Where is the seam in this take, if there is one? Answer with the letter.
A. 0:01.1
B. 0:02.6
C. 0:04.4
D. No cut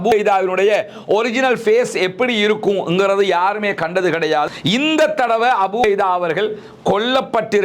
C